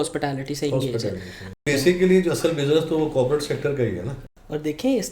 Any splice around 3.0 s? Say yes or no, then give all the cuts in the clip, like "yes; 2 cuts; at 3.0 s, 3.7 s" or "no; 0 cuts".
no; 2 cuts; at 1.6 s, 4.2 s